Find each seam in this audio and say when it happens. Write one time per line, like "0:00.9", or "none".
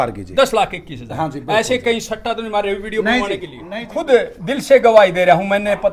0:03.6